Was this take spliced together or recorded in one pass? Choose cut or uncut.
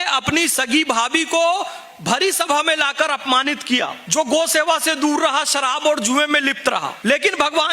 cut